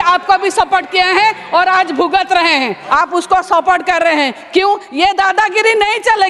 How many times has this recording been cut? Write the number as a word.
one